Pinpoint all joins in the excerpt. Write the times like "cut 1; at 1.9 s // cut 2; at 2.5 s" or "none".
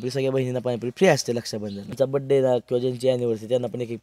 cut 1; at 1.9 s